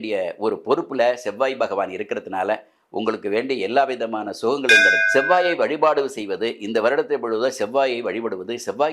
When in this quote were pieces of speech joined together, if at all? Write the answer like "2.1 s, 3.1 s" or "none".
5.0 s